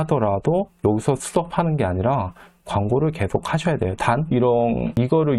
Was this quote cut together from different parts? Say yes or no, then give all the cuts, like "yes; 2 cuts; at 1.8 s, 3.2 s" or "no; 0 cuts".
no; 0 cuts